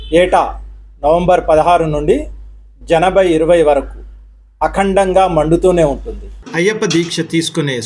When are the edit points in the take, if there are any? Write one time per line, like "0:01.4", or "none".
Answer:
0:06.3

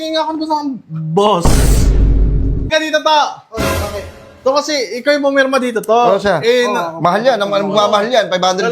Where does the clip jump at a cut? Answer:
0:02.7

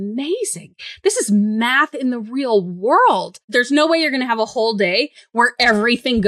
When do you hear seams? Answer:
0:03.4

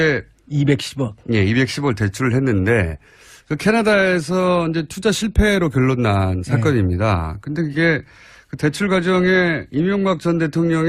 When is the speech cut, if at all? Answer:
0:03.1

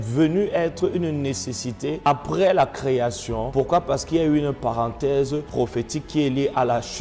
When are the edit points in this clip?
0:02.1
0:03.4
0:05.5

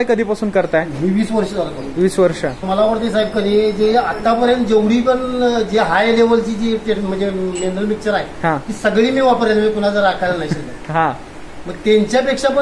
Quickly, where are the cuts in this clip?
0:02.6

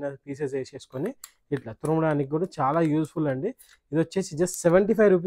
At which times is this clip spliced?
none

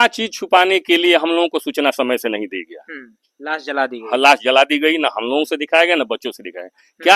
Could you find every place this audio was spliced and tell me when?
none

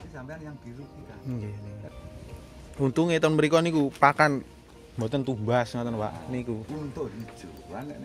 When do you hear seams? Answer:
0:01.9

